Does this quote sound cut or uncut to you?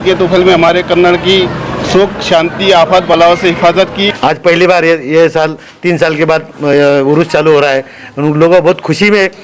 cut